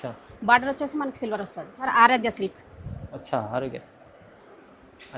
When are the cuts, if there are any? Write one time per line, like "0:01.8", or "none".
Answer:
0:01.8